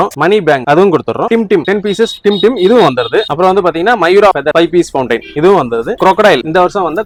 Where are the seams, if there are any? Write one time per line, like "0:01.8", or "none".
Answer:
none